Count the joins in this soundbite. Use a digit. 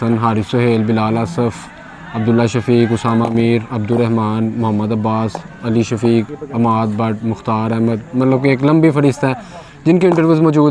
0